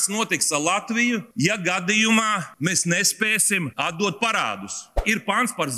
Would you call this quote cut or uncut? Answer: cut